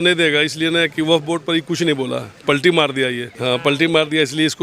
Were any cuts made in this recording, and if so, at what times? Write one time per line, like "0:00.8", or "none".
0:03.3